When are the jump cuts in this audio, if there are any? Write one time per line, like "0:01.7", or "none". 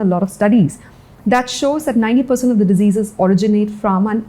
none